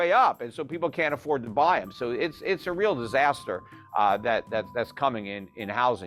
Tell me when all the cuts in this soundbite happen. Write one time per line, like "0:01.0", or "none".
none